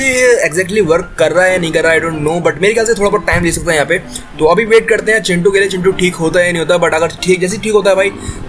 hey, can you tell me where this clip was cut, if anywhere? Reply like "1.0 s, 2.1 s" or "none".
none